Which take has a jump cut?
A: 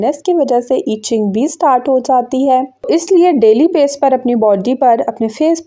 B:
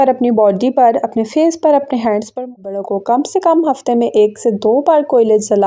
B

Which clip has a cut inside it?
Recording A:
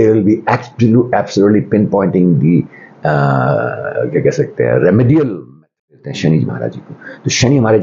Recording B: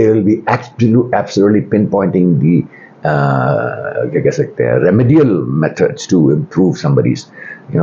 A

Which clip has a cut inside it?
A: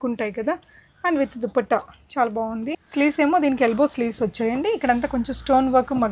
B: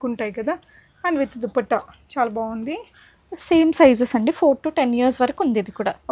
A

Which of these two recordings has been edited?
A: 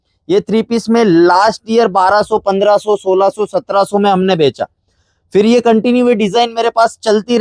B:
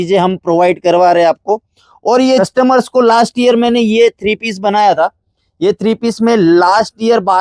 B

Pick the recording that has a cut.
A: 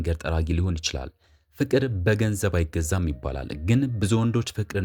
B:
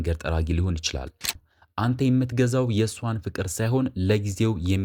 B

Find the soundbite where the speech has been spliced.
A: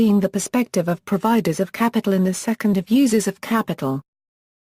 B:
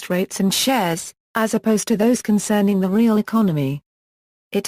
A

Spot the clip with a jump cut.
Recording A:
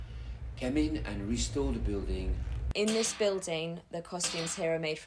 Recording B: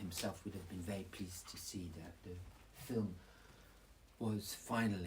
A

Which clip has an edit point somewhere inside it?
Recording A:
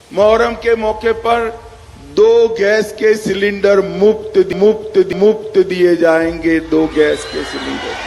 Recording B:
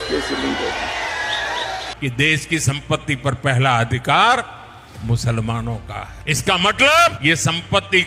B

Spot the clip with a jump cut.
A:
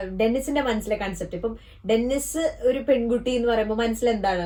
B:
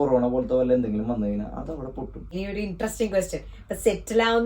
B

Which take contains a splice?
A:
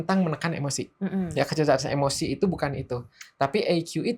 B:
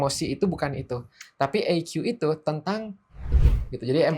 B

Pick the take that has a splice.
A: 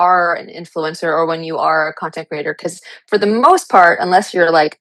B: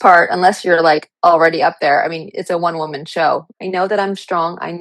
B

